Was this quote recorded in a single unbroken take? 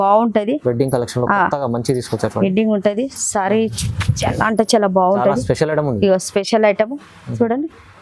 yes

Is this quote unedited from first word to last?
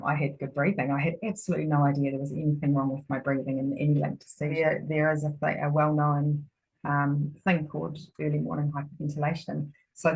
no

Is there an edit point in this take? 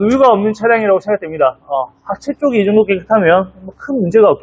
no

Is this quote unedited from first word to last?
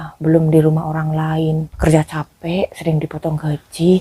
no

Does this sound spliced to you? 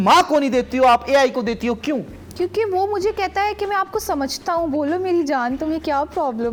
no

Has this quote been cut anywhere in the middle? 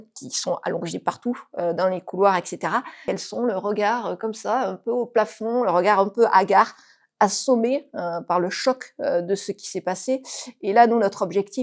yes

